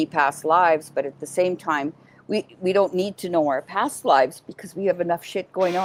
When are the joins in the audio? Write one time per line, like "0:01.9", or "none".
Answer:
none